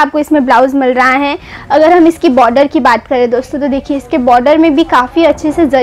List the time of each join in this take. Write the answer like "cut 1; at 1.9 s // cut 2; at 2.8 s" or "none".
cut 1; at 1.5 s